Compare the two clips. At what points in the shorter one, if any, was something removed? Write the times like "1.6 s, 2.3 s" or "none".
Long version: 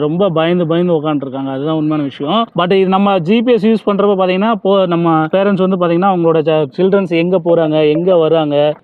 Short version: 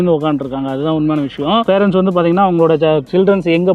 1.6 s